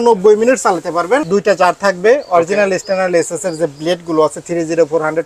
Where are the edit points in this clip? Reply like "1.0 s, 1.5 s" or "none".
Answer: 1.2 s